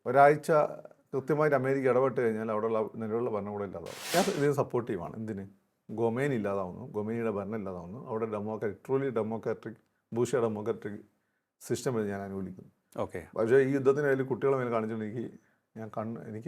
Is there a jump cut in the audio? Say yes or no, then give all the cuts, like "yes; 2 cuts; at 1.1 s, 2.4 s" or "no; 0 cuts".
yes; 1 cut; at 4.1 s